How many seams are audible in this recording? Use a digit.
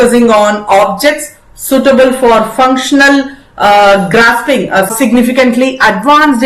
1